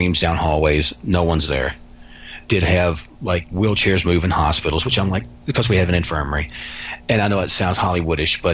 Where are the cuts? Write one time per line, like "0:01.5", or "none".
none